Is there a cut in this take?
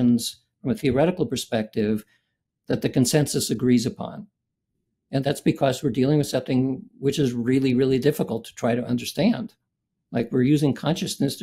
yes; 1 cut; at 5.2 s

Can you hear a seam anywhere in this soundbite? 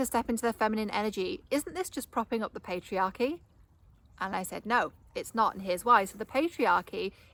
no; 0 cuts

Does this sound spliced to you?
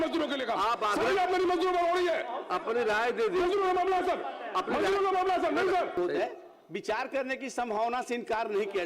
yes; 1 cut; at 6.0 s

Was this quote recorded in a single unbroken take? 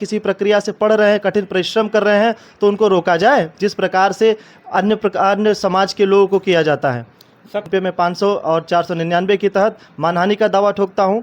no; 1 cut; at 7.7 s

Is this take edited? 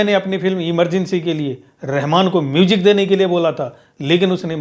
no; 0 cuts

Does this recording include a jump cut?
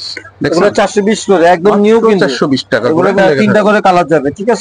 yes; 1 cut; at 3.2 s

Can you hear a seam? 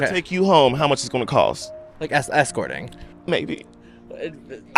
no; 0 cuts

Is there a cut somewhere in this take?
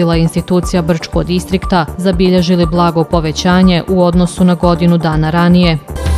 no; 0 cuts

